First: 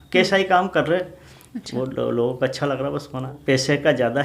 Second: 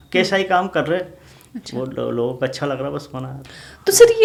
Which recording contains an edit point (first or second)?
first